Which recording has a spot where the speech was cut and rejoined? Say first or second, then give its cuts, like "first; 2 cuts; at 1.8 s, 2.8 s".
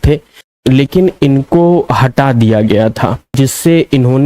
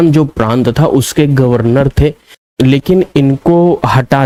first; 1 cut; at 3.3 s